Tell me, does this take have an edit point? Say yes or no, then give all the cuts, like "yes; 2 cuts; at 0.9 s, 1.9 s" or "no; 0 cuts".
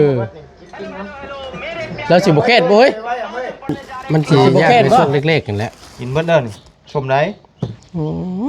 yes; 1 cut; at 5.1 s